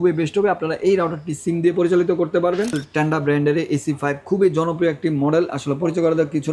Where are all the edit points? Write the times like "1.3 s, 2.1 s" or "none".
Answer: 2.8 s